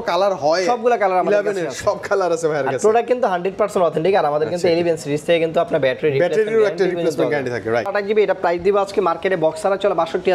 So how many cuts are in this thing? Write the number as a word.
one